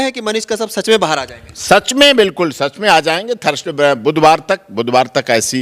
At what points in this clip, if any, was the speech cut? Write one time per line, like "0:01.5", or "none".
none